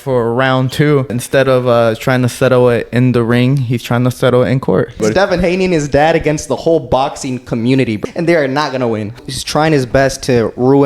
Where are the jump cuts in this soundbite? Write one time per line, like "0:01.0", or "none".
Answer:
0:01.2
0:05.0
0:08.0
0:09.2